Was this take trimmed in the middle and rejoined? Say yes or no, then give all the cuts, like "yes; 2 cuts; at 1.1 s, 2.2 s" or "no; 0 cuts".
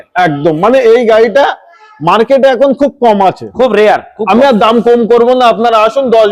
no; 0 cuts